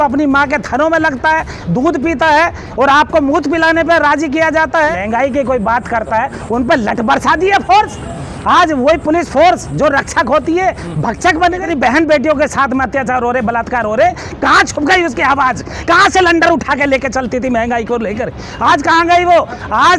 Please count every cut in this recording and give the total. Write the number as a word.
two